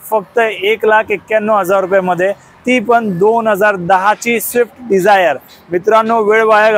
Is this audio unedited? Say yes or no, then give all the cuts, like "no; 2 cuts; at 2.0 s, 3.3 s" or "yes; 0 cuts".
yes; 0 cuts